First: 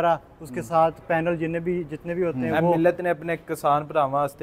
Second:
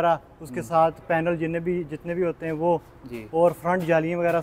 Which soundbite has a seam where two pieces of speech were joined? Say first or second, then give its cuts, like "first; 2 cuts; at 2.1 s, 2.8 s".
first; 1 cut; at 2.8 s